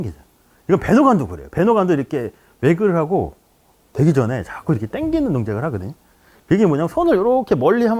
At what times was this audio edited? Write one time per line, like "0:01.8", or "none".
none